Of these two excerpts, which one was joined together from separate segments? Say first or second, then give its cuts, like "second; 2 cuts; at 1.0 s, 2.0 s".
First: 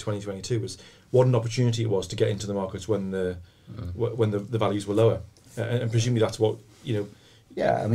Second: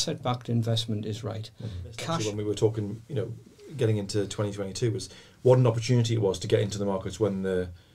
second; 1 cut; at 2.2 s